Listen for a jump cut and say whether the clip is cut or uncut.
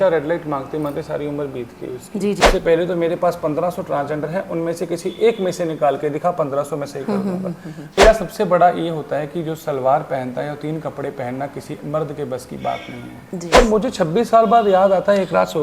cut